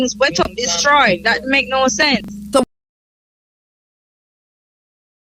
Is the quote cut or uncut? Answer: uncut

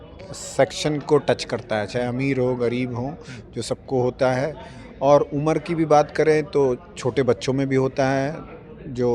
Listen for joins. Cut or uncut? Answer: uncut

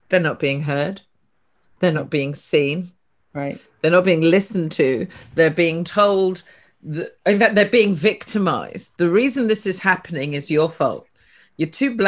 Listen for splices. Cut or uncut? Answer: uncut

